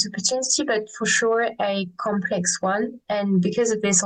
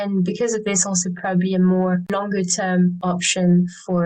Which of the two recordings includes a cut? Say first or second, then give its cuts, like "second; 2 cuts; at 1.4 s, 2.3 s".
second; 2 cuts; at 2.1 s, 3.0 s